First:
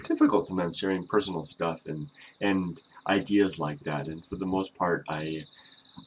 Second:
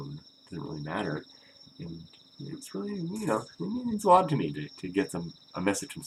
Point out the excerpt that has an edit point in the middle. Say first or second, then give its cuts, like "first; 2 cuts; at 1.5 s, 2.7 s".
first; 1 cut; at 4.2 s